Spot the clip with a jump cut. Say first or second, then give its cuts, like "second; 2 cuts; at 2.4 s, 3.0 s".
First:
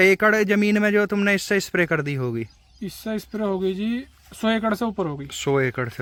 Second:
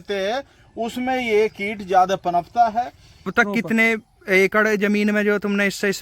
second; 1 cut; at 3.3 s